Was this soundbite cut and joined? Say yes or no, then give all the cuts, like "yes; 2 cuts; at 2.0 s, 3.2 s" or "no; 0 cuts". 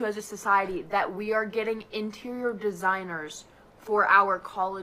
no; 0 cuts